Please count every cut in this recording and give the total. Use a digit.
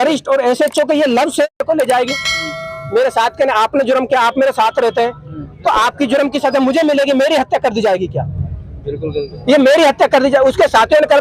1